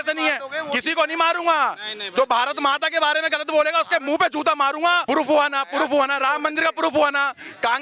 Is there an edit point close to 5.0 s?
yes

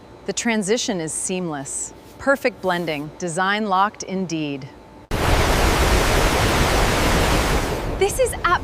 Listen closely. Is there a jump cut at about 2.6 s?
no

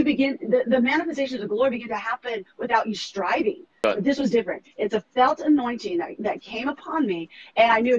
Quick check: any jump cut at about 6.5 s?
no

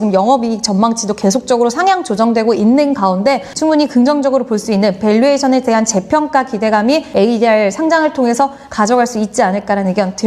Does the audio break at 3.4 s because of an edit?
no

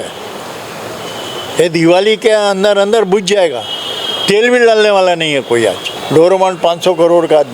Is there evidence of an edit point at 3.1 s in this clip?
no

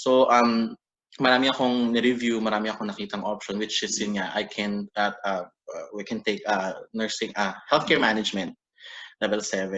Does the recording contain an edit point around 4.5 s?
no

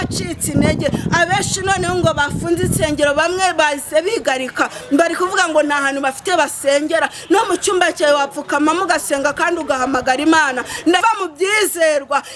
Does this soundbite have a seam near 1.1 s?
no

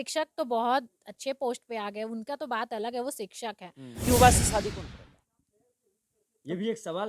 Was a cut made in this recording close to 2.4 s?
no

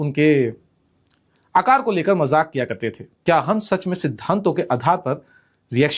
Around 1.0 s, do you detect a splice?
no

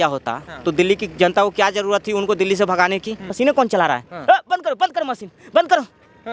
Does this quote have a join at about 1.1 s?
no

